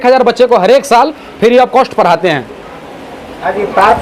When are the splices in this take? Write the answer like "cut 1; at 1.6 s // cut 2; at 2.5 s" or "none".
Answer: none